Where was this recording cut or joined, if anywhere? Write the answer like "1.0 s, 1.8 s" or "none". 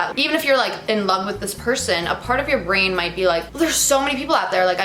none